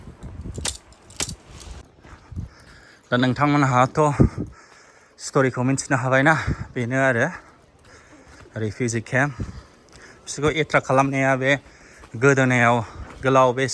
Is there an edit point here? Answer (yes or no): no